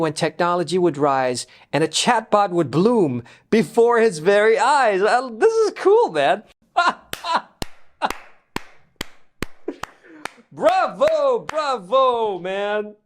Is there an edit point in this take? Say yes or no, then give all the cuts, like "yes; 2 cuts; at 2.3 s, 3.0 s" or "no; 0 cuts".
yes; 1 cut; at 6.6 s